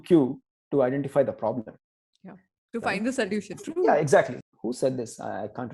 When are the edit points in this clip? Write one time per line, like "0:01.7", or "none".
0:04.4

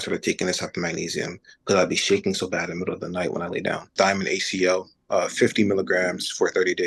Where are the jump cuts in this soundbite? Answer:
0:03.9

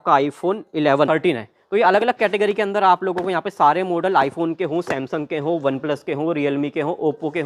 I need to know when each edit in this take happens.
0:01.1

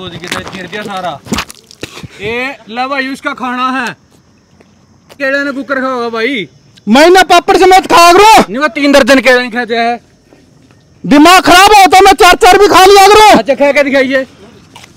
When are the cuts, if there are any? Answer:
0:02.1
0:05.1

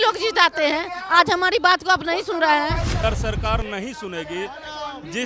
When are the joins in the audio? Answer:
0:03.0

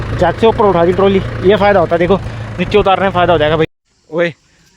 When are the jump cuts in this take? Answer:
0:03.7

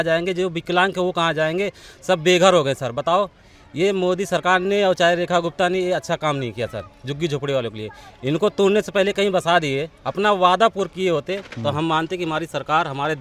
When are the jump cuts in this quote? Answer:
none

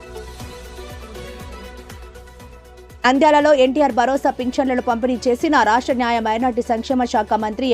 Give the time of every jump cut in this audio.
0:02.8

